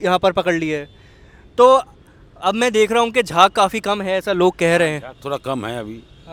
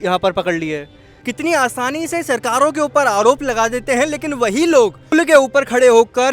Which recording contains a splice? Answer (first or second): second